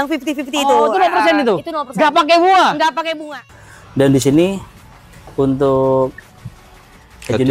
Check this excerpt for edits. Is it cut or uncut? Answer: cut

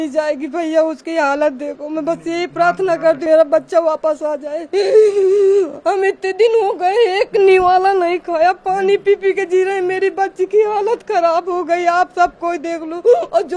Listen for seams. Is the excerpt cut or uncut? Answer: cut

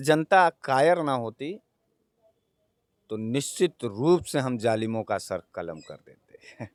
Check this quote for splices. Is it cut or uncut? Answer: uncut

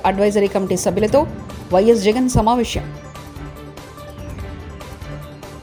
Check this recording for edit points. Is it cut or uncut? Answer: uncut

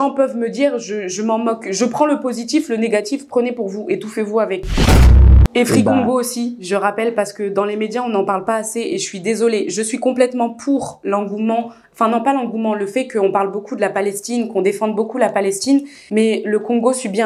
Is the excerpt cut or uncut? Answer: cut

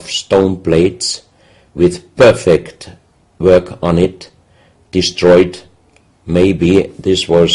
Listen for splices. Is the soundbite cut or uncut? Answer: cut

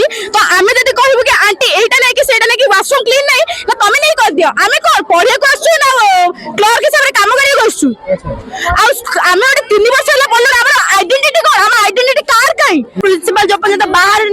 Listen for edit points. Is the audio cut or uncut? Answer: cut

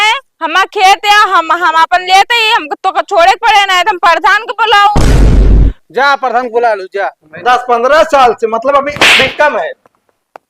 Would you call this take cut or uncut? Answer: cut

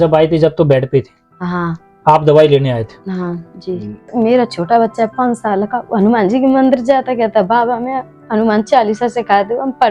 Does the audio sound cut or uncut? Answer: cut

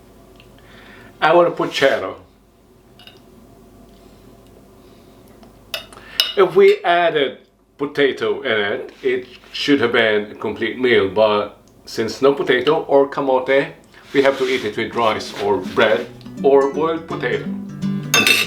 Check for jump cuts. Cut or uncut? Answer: uncut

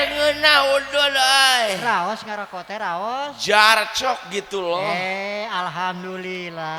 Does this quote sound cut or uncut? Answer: uncut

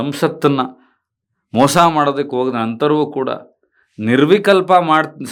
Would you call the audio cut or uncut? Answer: uncut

